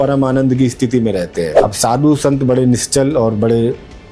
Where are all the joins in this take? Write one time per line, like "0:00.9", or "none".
0:01.5